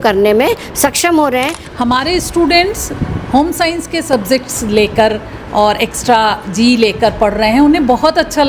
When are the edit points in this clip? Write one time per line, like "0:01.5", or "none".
0:01.6